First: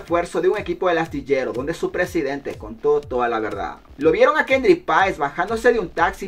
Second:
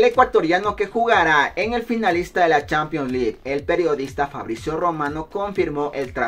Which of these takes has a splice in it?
first; 1 cut; at 3.9 s

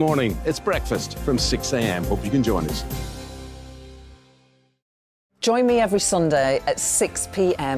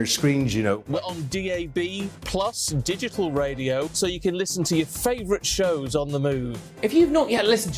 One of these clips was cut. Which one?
first; 1 cut; at 5.0 s

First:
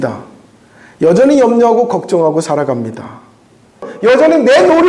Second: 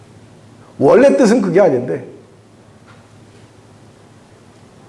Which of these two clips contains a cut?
first; 1 cut; at 3.9 s

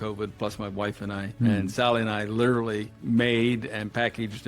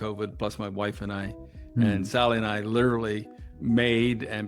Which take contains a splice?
first; 2 cuts; at 1.3 s, 2.9 s

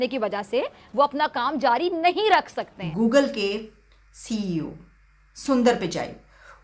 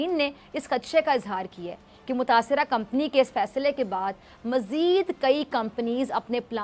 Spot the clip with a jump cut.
first; 1 cut; at 2.8 s

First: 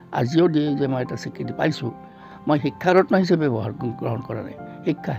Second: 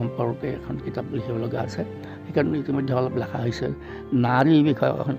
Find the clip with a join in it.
first; 1 cut; at 2.3 s

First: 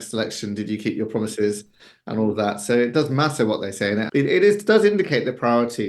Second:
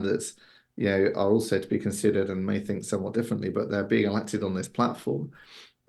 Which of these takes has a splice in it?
first; 1 cut; at 4.1 s

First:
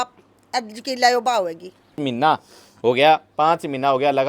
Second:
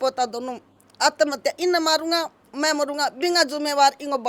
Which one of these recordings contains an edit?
first; 1 cut; at 2.0 s

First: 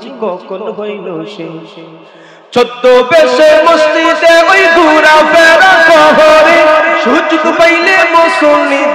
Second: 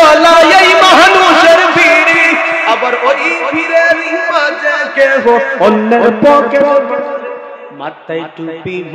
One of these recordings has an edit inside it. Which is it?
second; 1 cut; at 7.5 s

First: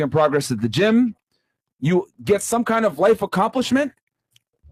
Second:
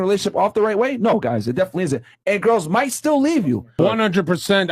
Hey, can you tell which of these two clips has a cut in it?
second; 1 cut; at 3.7 s

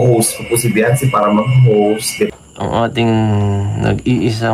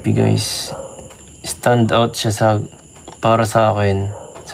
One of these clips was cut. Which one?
first; 1 cut; at 2.1 s

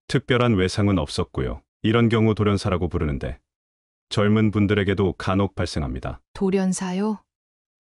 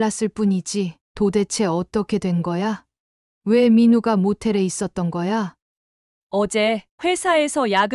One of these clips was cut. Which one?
second; 2 cuts; at 1.0 s, 5.6 s

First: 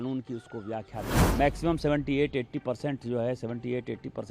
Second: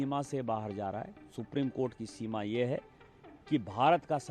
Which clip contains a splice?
first; 1 cut; at 1.1 s

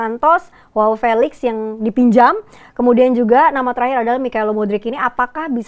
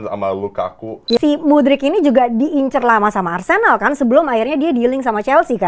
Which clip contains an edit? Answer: second; 1 cut; at 1.2 s

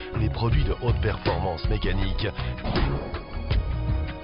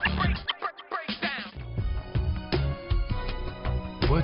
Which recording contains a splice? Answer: second; 1 cut; at 1.6 s

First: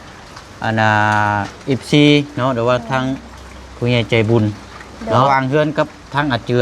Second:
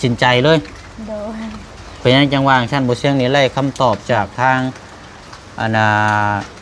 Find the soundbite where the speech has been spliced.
first; 1 cut; at 5.2 s

